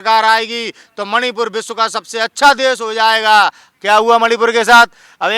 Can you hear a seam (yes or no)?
no